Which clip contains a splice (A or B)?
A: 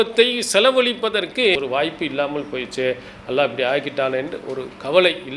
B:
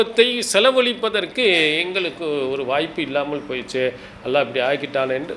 A